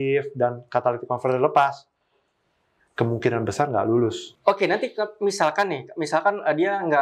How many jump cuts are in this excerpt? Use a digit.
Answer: 1